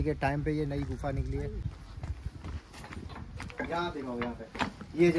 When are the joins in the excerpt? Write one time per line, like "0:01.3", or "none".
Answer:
0:01.8